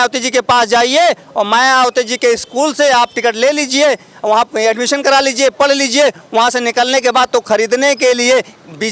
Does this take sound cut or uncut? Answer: uncut